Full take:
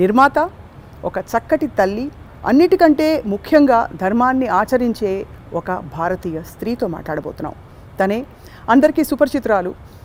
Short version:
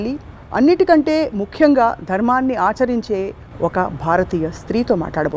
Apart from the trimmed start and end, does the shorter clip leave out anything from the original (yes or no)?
no